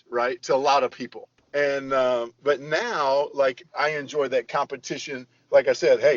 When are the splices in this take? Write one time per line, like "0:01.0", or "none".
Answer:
0:01.4